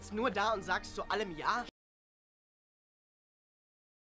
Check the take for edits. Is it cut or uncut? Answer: uncut